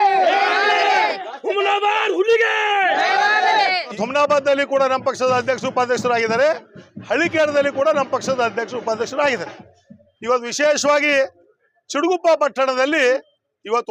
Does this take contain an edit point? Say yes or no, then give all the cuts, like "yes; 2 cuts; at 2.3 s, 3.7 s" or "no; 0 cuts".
yes; 1 cut; at 4.0 s